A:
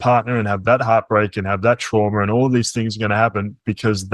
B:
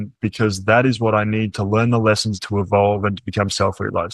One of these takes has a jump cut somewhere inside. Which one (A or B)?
B